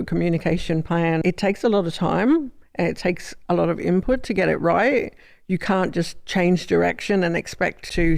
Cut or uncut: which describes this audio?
cut